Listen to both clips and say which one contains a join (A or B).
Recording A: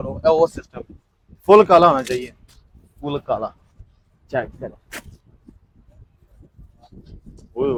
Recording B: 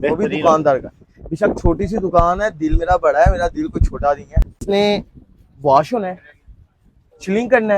B